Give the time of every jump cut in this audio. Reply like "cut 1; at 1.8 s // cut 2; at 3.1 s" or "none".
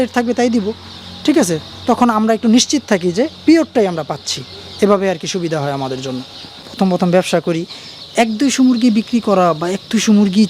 cut 1; at 6.6 s